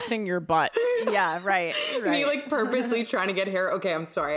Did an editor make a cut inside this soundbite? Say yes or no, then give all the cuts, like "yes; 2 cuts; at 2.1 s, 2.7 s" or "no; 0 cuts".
no; 0 cuts